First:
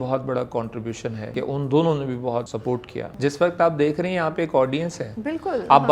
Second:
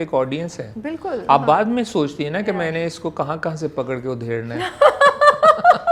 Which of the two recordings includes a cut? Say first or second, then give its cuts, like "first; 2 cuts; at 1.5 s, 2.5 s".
first; 2 cuts; at 1.3 s, 2.7 s